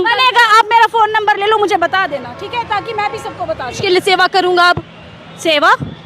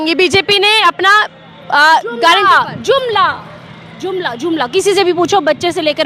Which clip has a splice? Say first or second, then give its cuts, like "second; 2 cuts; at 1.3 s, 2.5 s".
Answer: first; 1 cut; at 3.8 s